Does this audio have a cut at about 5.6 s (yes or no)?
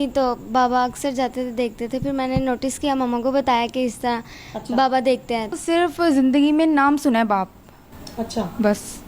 yes